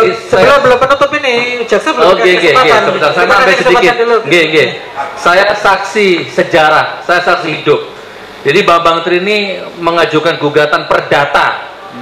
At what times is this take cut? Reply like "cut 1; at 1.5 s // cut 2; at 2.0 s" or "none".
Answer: none